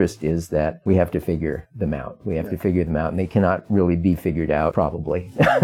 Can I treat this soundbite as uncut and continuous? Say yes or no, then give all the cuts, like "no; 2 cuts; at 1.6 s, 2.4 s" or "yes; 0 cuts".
no; 2 cuts; at 0.8 s, 4.7 s